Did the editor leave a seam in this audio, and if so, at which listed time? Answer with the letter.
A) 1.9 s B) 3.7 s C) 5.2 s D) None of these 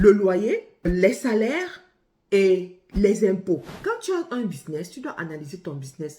B